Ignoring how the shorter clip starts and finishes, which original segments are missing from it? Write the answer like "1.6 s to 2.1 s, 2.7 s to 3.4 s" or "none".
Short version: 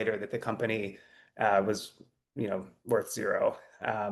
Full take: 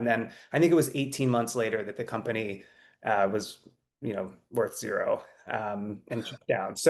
none